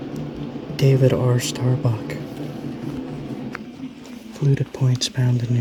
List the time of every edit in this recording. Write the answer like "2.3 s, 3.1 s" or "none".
none